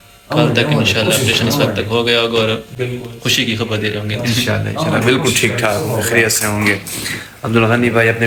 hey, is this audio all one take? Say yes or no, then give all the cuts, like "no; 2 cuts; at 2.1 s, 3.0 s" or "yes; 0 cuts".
yes; 0 cuts